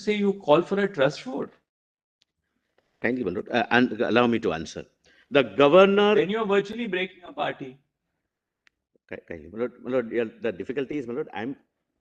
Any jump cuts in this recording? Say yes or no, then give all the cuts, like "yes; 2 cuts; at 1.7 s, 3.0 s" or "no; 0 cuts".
no; 0 cuts